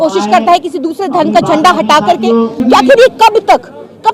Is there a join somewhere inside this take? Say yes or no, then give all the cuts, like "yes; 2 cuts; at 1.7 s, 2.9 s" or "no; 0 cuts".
yes; 1 cut; at 2.6 s